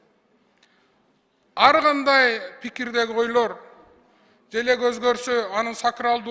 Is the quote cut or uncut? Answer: uncut